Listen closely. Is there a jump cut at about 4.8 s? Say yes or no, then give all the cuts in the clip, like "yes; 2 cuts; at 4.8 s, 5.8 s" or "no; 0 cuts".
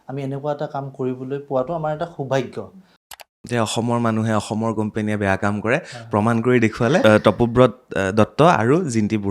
no; 2 cuts; at 3.4 s, 7.0 s